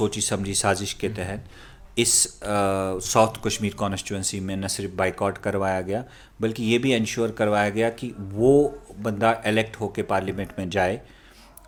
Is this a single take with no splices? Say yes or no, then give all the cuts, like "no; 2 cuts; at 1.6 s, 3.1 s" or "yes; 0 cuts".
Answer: yes; 0 cuts